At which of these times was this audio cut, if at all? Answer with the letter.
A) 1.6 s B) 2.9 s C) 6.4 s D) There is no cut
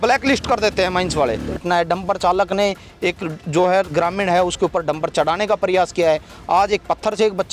A